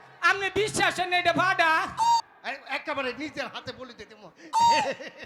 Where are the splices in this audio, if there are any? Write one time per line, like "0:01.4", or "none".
0:02.2